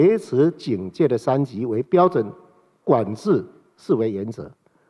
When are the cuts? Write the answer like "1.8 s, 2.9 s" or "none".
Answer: none